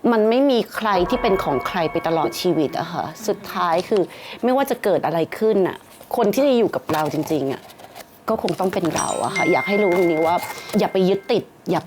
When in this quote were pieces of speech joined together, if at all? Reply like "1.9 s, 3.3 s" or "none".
none